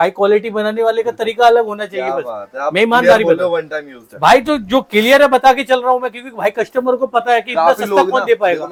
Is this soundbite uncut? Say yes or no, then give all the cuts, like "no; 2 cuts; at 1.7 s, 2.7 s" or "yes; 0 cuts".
yes; 0 cuts